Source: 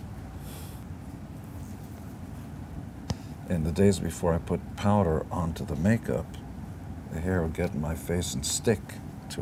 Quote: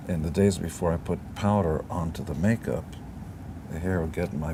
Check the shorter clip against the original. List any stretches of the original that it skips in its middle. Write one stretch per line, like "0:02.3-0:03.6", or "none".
none